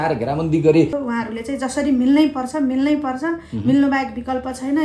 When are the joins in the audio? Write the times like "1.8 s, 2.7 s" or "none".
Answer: 1.0 s